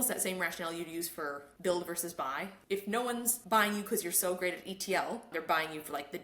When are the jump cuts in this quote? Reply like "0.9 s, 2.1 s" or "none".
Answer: 1.5 s, 2.5 s, 3.4 s, 5.3 s

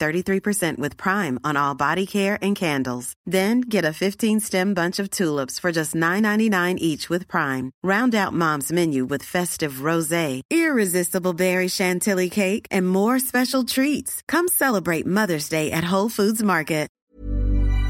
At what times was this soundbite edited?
17.0 s

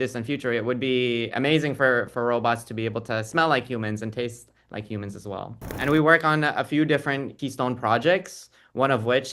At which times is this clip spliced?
5.8 s, 7.3 s

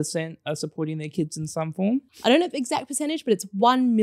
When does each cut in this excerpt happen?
2.1 s

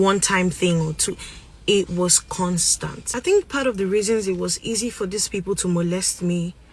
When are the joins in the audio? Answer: 3.3 s

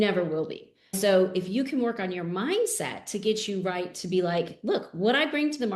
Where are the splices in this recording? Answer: 1.0 s

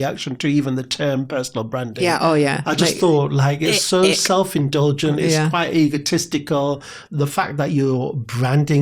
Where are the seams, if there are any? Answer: 6.9 s

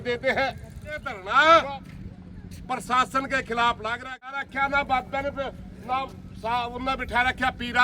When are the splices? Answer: 1.2 s, 4.4 s

